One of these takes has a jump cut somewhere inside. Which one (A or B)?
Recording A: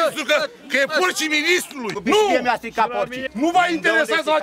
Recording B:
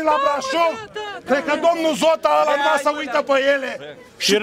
A